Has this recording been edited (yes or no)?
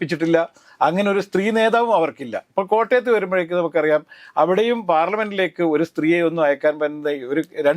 no